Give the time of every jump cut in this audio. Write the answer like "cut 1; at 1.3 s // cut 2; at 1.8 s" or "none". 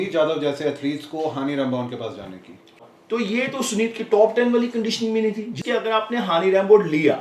cut 1; at 2.8 s // cut 2; at 5.6 s